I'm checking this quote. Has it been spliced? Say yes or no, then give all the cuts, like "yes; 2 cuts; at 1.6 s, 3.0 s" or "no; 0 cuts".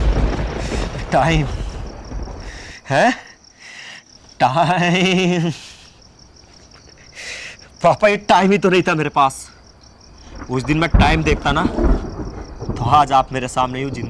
no; 0 cuts